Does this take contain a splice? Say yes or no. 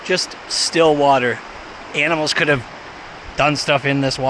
no